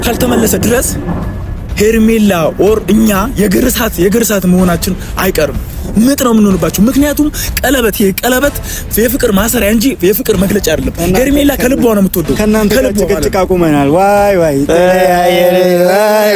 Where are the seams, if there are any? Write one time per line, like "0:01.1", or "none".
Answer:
none